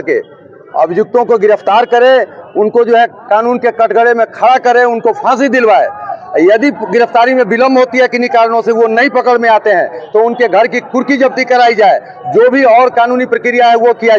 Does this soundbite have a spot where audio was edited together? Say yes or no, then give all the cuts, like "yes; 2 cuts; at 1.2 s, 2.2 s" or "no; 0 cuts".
no; 0 cuts